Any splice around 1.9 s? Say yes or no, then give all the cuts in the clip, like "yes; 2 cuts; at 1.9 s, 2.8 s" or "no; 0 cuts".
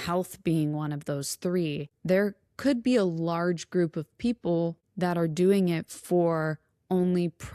no; 0 cuts